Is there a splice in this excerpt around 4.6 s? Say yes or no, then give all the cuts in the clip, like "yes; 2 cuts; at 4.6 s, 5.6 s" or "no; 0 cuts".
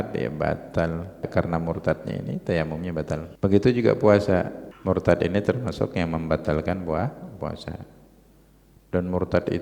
yes; 3 cuts; at 1.3 s, 3.3 s, 4.6 s